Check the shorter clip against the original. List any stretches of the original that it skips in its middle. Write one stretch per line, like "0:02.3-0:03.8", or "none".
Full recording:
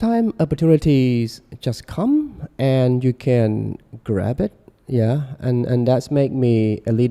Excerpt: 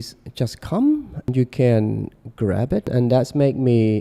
0:02.6-0:03.0
0:04.6-0:05.7